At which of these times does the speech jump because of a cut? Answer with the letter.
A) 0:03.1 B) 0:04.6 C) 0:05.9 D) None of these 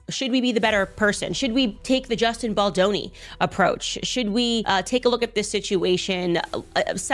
B